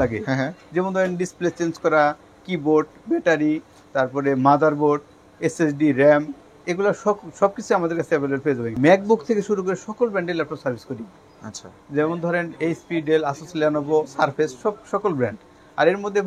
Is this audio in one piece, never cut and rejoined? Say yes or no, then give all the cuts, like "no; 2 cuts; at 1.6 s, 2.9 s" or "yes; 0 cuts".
no; 1 cut; at 8.7 s